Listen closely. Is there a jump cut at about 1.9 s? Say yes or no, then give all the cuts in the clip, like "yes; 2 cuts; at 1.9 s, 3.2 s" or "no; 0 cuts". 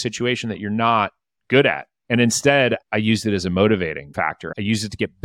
yes; 2 cuts; at 1.9 s, 4.0 s